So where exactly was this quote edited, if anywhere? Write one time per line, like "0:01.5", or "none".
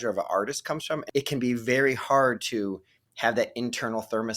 0:01.0